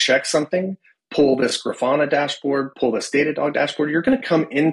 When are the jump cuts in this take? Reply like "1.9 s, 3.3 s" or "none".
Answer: none